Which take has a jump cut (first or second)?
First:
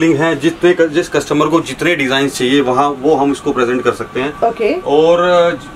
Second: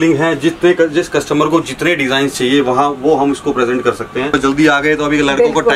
second